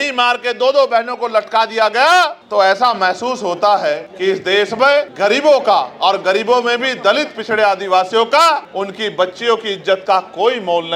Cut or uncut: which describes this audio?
uncut